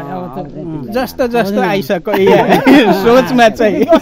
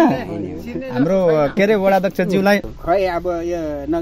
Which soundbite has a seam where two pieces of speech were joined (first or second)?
second